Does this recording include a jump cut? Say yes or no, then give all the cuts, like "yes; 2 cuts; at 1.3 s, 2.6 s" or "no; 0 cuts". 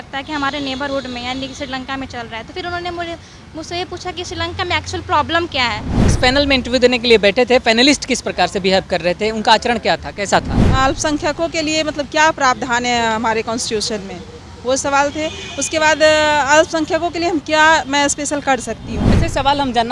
yes; 3 cuts; at 6.1 s, 10.6 s, 19.2 s